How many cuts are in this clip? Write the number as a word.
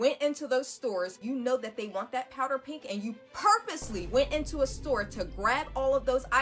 one